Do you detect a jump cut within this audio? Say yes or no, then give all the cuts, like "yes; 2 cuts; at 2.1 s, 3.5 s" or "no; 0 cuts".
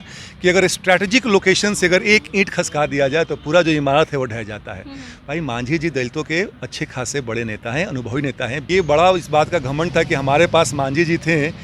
yes; 1 cut; at 8.6 s